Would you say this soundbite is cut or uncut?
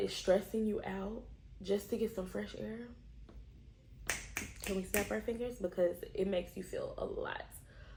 uncut